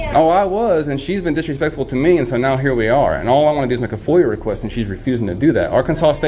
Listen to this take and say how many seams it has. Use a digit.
0